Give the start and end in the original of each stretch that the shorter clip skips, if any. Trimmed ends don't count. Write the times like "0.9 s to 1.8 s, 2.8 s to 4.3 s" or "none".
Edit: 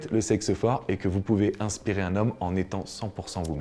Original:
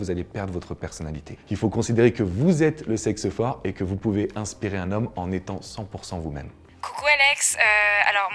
none